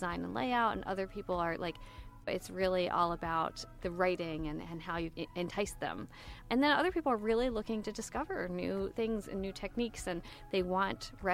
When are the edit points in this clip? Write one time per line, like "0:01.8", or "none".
0:02.3
0:03.7
0:05.1
0:06.4